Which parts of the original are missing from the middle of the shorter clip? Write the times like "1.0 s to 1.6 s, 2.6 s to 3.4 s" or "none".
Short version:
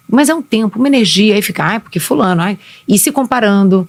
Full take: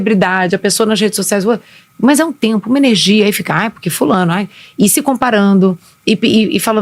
none